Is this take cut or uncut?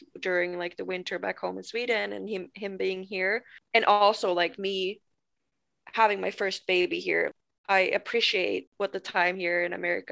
cut